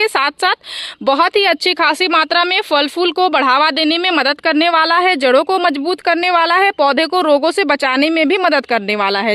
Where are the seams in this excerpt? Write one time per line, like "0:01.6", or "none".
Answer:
none